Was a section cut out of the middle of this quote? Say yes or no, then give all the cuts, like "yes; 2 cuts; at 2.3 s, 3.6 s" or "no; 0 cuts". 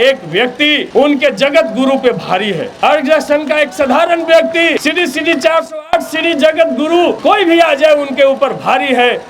yes; 4 cuts; at 0.8 s, 2.7 s, 4.8 s, 7.2 s